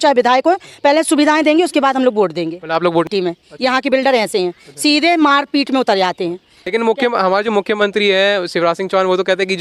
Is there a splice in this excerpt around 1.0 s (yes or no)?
no